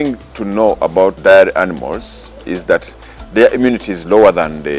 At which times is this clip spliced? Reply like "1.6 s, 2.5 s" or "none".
1.2 s